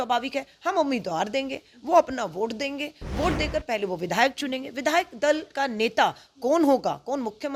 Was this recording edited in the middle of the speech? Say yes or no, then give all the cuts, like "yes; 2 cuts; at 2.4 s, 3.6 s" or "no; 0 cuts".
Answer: no; 0 cuts